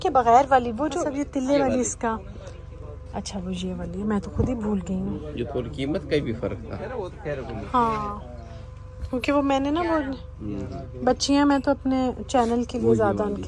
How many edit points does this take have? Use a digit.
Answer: 0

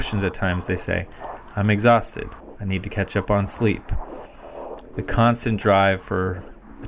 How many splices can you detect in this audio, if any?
0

